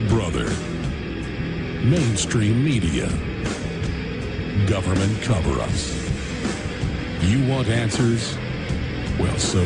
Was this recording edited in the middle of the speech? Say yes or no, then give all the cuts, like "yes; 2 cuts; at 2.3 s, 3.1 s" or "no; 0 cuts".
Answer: no; 0 cuts